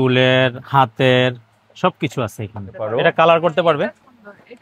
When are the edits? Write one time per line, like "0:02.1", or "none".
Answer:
0:02.8